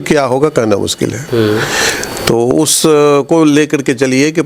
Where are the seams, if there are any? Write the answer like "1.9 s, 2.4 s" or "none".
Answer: none